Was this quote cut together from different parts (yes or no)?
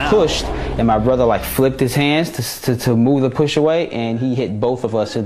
no